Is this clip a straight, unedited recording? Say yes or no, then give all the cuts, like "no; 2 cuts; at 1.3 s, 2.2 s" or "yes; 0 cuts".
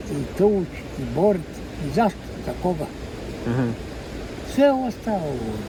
yes; 0 cuts